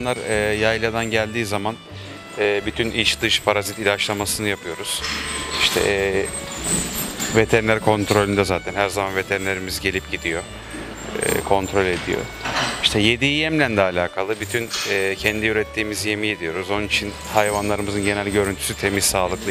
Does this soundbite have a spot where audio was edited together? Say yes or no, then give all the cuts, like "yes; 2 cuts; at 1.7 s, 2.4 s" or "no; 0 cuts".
no; 0 cuts